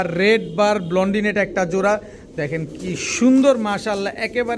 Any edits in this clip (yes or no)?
no